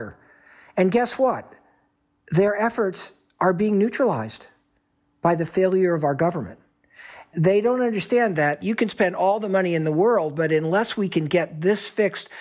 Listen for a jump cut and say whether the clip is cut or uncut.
cut